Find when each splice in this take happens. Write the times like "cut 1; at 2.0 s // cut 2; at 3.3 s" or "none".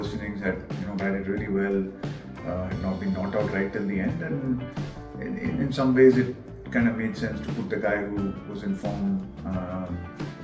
none